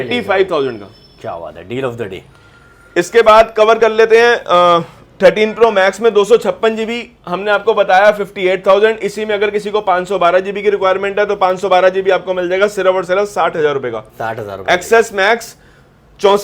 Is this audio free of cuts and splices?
yes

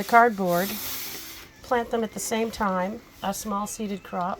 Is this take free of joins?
yes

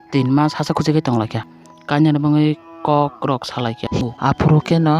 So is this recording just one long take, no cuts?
no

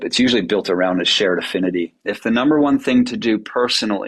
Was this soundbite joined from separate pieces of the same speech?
yes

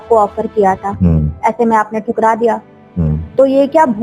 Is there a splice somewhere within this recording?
no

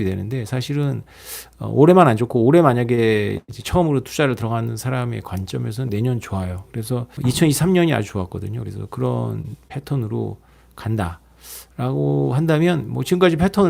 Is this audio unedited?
no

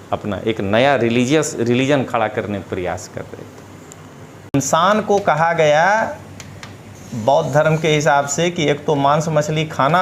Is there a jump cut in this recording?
yes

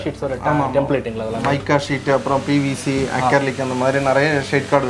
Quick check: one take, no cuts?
yes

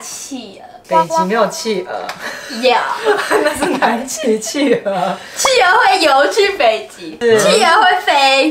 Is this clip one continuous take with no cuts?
yes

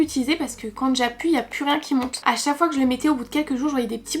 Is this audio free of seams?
no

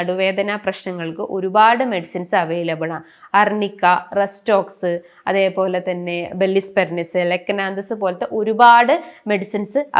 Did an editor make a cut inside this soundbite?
no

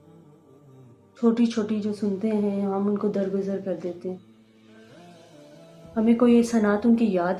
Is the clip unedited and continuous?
no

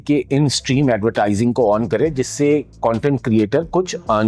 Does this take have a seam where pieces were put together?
no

